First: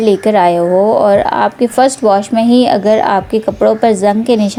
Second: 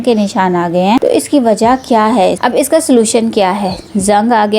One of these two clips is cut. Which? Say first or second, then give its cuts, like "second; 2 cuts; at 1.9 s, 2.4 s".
second; 1 cut; at 2.4 s